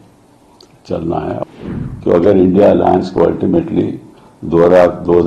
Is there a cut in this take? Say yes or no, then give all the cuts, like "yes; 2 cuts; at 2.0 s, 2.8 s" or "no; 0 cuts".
yes; 1 cut; at 1.4 s